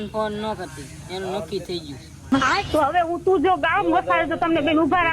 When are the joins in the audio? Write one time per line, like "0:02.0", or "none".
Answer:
0:02.3